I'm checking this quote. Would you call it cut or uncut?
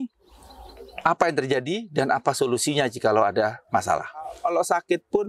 cut